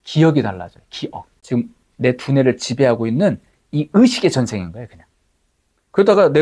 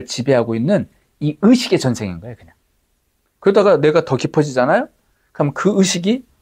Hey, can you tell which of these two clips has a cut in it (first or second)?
first